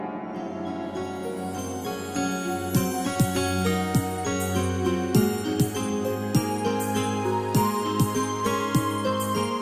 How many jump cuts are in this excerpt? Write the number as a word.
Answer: zero